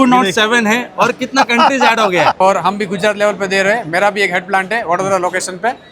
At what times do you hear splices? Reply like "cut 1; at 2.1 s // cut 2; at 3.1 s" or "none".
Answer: cut 1; at 2.4 s